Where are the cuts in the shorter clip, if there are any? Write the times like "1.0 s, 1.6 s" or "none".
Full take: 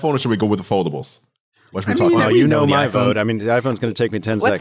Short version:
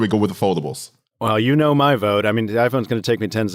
1.5 s